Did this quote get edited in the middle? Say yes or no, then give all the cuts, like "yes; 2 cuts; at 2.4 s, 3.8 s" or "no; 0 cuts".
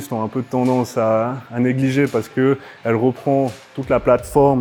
no; 0 cuts